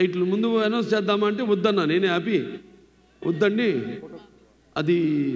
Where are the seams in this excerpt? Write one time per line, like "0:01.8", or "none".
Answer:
none